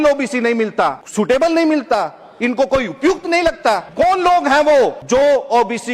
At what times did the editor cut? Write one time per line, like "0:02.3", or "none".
0:01.0
0:03.9
0:05.0